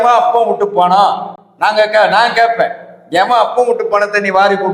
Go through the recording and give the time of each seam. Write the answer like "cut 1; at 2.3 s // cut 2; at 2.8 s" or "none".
none